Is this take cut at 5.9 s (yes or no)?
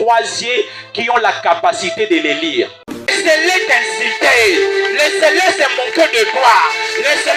no